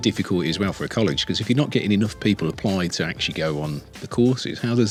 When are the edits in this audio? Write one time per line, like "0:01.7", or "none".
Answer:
none